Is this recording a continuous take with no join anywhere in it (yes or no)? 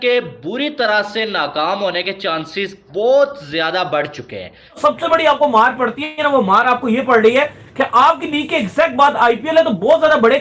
no